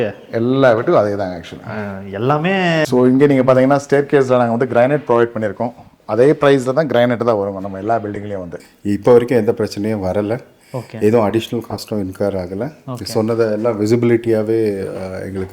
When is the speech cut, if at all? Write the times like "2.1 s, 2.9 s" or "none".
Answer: 2.8 s, 8.6 s